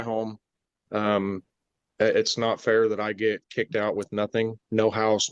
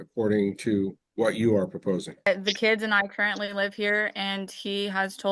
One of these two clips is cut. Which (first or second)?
second